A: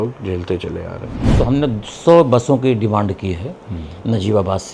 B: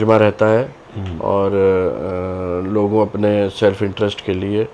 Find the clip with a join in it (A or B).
A